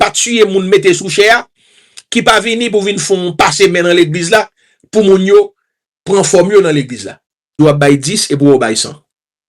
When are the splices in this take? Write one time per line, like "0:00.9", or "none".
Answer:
0:07.6